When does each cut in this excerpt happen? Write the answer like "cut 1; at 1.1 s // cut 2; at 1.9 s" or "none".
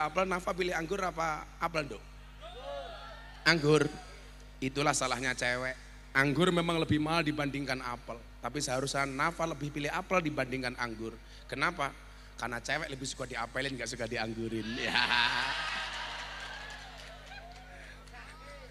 none